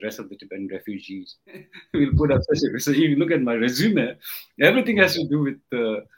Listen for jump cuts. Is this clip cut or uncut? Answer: cut